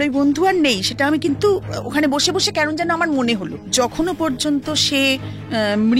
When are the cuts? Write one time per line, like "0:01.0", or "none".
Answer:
0:03.6